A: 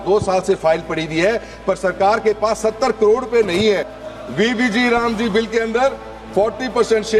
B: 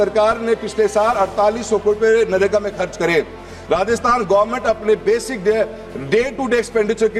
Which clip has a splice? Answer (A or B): A